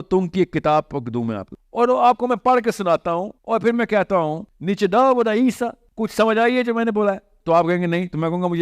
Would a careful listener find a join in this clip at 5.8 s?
yes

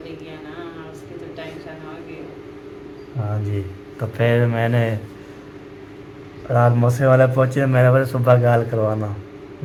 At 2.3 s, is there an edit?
no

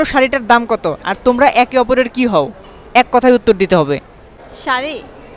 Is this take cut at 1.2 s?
no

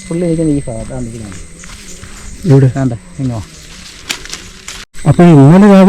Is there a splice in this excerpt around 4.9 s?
yes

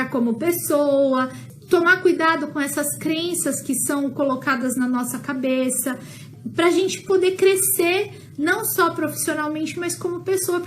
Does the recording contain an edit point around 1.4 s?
yes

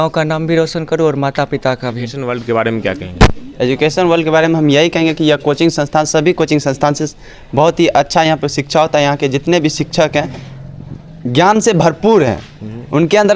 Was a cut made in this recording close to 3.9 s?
no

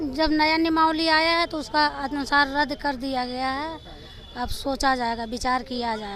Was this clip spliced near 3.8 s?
no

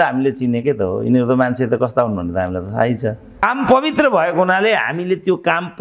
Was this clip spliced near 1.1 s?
no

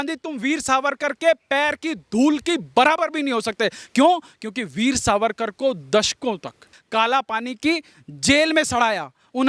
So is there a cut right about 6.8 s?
yes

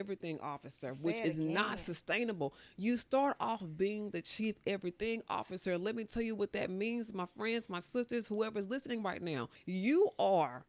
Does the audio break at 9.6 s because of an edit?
yes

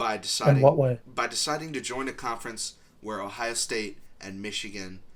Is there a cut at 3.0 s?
no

